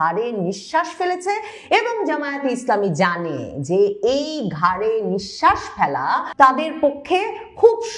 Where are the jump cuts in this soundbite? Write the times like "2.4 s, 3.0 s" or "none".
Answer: 6.3 s